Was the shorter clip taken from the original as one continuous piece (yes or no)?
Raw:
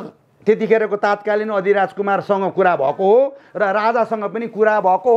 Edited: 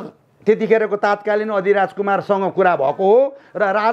yes